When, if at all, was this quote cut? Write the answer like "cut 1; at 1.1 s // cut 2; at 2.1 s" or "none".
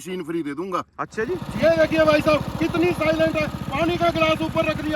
cut 1; at 1.5 s